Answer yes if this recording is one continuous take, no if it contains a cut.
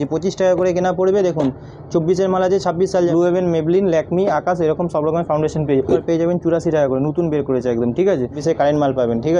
no